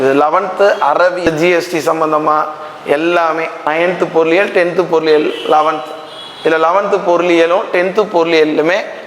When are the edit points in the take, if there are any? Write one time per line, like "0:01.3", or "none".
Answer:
0:01.2
0:03.7